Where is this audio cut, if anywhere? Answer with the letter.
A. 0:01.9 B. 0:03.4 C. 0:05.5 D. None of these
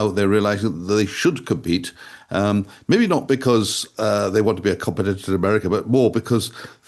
D